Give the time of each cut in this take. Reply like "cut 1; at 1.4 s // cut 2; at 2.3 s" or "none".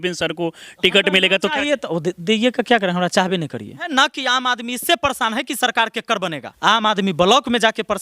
cut 1; at 3.9 s // cut 2; at 6.5 s